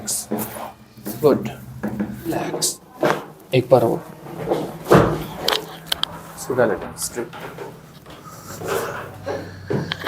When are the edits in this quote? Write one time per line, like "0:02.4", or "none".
0:02.5